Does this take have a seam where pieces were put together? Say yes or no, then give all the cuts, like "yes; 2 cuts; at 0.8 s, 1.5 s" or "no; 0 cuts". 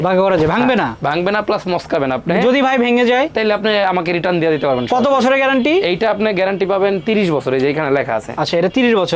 no; 0 cuts